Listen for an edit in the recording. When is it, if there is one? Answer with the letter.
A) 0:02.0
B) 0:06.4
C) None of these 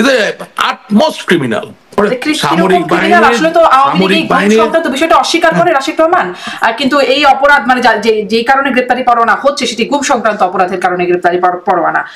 A